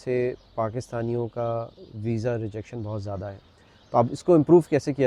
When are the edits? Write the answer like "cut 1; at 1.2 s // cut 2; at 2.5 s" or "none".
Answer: none